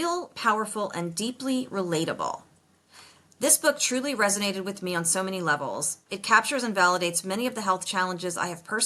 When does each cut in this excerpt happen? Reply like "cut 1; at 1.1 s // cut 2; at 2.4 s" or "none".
none